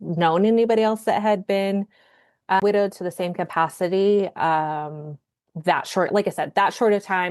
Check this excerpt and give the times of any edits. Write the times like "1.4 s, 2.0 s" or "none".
2.6 s